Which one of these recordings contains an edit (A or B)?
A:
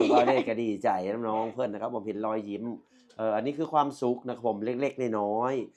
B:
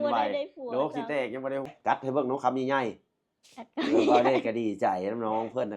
B